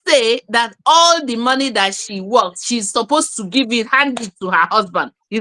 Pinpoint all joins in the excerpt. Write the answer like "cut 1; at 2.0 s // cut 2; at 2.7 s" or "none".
none